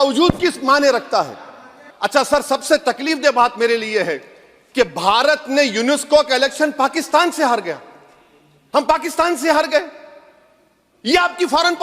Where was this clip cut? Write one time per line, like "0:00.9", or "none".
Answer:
0:01.9